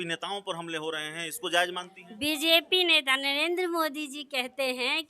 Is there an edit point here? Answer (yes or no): no